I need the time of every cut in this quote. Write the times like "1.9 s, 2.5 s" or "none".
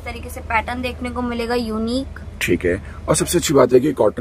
none